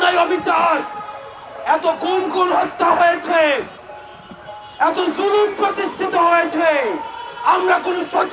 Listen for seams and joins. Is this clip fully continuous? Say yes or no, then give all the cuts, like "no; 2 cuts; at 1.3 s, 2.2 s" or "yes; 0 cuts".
yes; 0 cuts